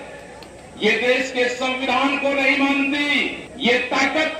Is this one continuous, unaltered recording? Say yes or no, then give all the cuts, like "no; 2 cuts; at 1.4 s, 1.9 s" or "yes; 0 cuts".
no; 1 cut; at 3.4 s